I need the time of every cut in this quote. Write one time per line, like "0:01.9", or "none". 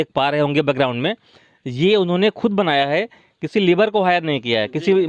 none